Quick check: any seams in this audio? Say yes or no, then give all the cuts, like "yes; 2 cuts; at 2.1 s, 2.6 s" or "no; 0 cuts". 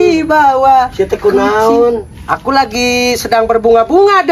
no; 0 cuts